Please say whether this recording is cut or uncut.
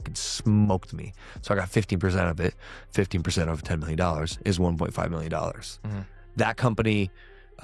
cut